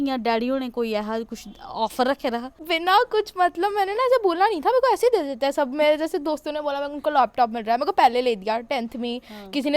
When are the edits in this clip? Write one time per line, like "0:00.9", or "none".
0:02.6